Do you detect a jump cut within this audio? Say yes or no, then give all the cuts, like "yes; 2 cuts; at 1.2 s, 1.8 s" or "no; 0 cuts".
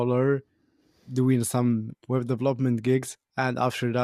no; 0 cuts